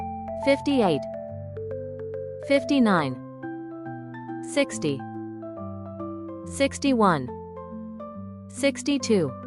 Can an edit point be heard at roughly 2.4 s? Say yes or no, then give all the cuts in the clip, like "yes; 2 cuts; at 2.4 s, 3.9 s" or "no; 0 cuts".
yes; 4 cuts; at 1.0 s, 2.4 s, 3.1 s, 4.4 s